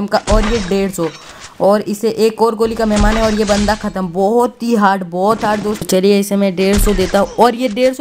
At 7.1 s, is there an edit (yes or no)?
no